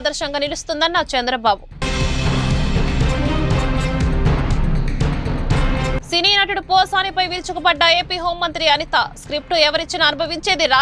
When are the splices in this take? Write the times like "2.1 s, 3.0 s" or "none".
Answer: 1.7 s, 6.0 s

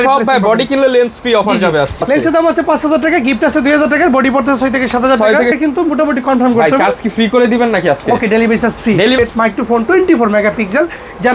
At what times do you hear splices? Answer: 2.0 s, 5.6 s, 9.2 s

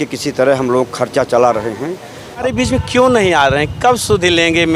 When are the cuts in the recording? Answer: 2.4 s

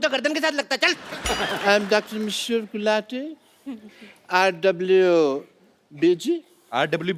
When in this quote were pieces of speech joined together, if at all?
1.1 s

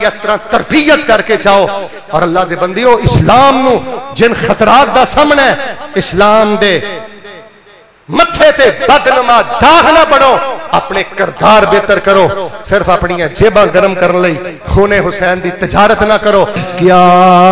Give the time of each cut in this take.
16.6 s

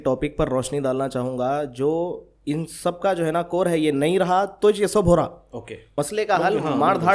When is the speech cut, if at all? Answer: 5.8 s

